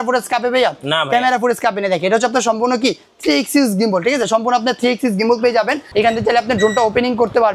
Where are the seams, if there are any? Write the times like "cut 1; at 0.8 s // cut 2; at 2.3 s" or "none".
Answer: cut 1; at 5.8 s